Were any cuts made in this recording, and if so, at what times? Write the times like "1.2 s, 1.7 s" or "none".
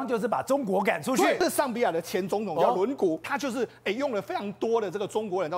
1.4 s, 3.3 s